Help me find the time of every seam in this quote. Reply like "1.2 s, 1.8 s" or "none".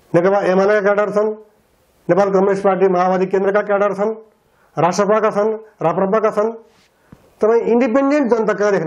none